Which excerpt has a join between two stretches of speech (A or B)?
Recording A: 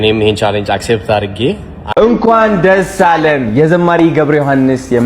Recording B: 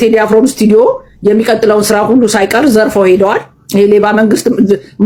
A